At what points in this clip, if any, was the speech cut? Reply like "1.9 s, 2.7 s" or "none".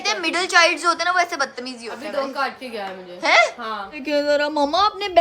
4.0 s